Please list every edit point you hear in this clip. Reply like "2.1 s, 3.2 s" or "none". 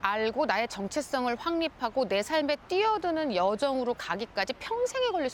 none